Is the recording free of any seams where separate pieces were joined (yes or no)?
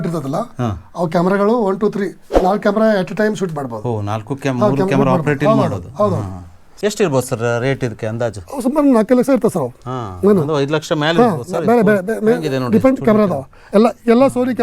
no